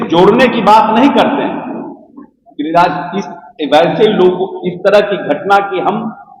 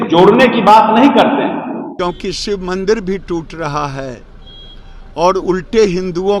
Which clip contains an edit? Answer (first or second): second